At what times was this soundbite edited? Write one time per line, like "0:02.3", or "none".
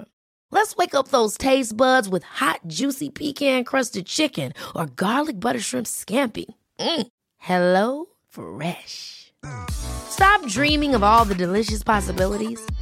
none